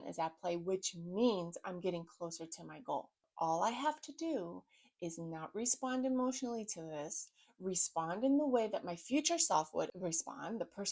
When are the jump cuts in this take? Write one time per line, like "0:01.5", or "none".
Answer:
0:03.3
0:09.9